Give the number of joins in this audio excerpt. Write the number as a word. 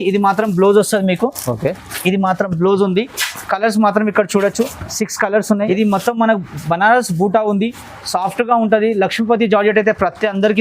one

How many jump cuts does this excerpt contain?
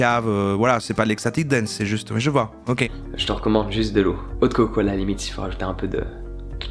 one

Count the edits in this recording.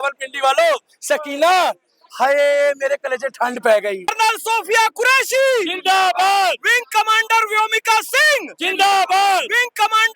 one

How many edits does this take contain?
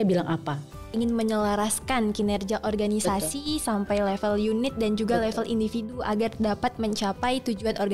one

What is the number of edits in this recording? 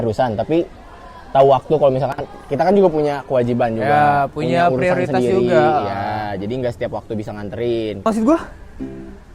one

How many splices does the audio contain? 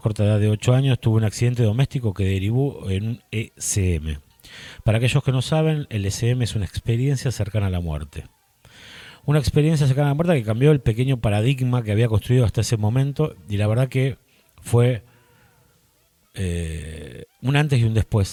zero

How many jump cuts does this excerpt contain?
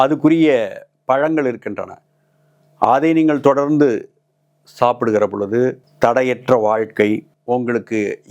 two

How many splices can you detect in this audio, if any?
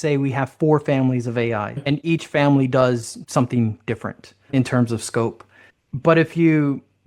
two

